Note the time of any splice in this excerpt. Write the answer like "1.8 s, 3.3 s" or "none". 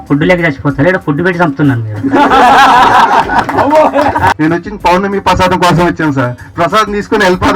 4.3 s

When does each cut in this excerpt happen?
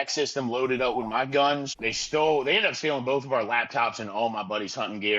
1.8 s

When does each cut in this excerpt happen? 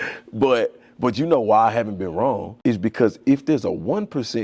2.5 s

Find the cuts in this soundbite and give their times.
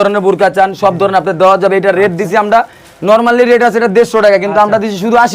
none

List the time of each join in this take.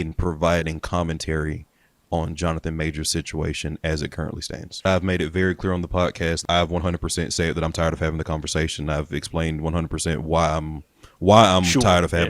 4.9 s, 6.4 s

